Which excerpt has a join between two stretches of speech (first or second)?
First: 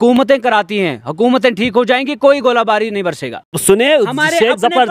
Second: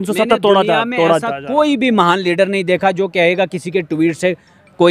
first